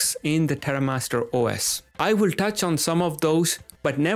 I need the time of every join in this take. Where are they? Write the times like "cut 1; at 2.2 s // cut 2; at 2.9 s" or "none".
none